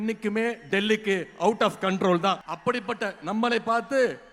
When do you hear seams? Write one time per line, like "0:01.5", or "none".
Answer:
0:02.5